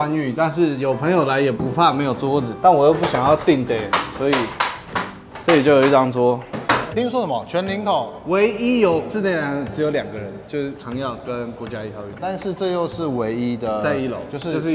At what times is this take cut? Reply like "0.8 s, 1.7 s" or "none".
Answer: 6.9 s, 12.1 s